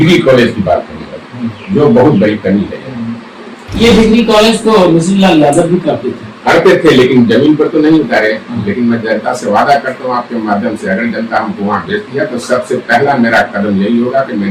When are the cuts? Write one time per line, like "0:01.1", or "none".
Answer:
none